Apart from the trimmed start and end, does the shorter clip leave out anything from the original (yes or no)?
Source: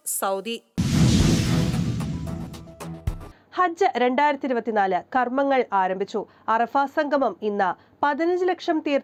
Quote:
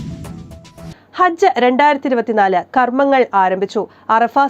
yes